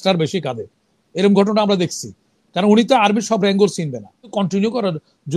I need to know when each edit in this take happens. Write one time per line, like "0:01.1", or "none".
0:04.3